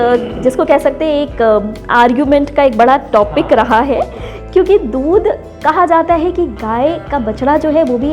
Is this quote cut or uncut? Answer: uncut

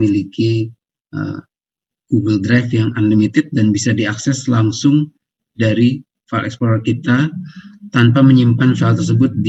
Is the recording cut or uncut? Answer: uncut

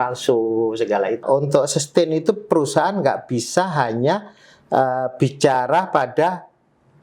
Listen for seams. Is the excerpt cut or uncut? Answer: cut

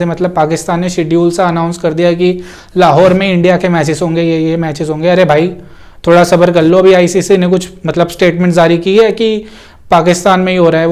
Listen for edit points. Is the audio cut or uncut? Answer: uncut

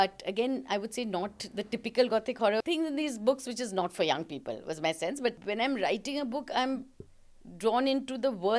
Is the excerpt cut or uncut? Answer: cut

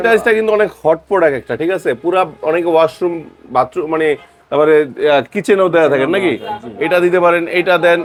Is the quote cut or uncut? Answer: uncut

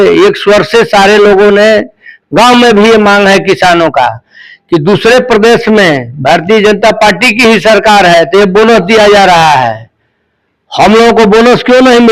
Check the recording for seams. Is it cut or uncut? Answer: uncut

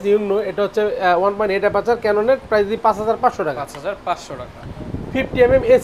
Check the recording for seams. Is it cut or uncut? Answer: uncut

